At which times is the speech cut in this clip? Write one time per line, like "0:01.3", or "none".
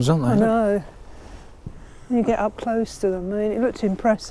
none